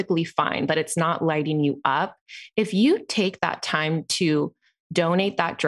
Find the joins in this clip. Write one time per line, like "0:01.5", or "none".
none